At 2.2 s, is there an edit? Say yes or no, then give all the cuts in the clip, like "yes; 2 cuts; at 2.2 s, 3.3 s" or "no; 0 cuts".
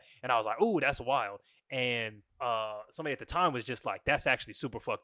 yes; 1 cut; at 2.2 s